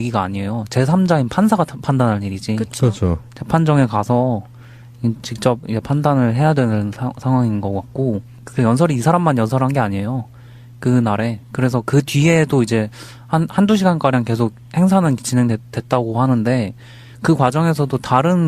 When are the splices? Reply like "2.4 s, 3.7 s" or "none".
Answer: 9.2 s